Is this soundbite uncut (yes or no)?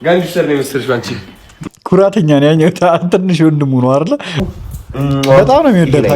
no